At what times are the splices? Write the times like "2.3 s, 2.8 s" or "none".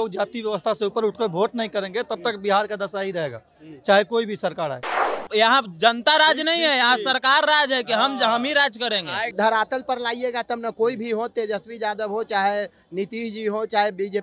5.2 s, 9.3 s

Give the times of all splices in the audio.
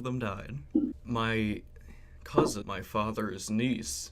1.0 s, 2.6 s

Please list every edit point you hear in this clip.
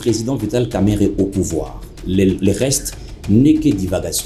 none

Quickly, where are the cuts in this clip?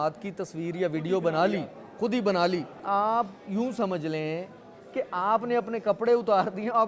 2.8 s

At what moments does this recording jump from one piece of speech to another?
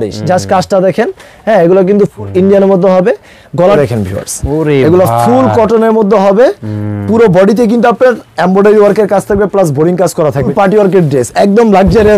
3.8 s, 10.5 s

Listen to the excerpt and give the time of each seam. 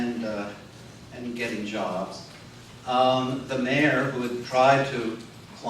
1.5 s

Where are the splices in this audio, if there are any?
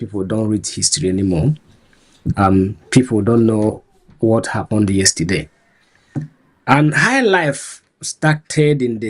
none

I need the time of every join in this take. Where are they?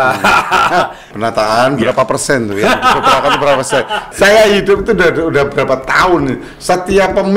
1.0 s, 4.1 s

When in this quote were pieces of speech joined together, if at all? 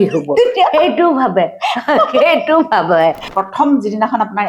3.3 s

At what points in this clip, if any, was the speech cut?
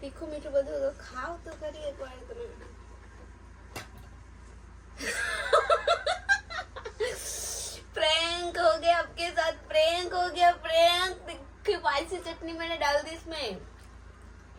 none

